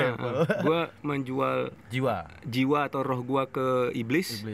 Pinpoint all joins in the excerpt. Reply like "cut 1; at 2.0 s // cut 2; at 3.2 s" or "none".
cut 1; at 1.8 s